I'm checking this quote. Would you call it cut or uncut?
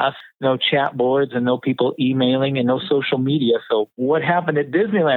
cut